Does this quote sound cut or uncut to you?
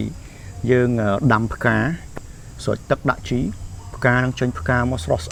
uncut